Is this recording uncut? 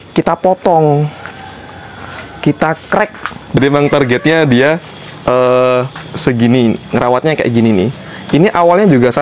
no; 1 cut; at 3.6 s

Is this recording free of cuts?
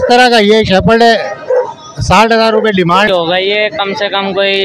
no; 1 cut; at 3.1 s

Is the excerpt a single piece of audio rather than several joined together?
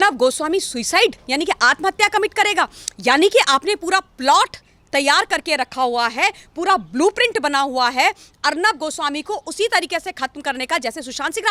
yes; 0 cuts

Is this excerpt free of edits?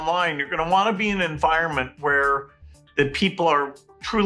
yes; 0 cuts

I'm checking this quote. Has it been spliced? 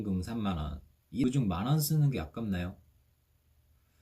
yes; 1 cut; at 1.2 s

